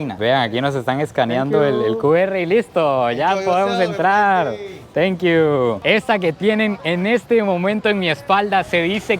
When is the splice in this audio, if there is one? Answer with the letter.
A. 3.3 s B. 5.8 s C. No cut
B